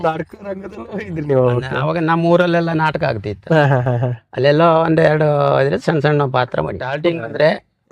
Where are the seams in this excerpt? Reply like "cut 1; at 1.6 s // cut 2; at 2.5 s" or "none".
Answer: cut 1; at 6.8 s